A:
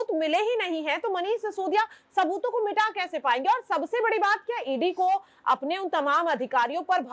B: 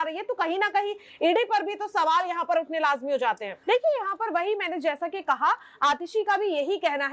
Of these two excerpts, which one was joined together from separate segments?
B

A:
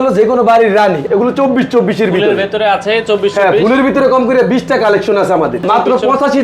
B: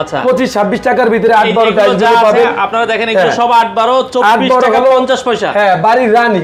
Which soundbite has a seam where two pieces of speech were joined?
A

